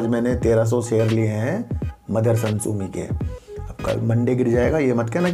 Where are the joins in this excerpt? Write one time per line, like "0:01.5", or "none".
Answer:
none